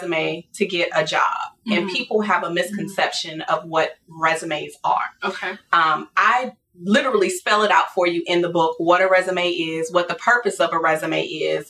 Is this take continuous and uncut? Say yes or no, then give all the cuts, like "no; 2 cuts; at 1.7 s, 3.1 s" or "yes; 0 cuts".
yes; 0 cuts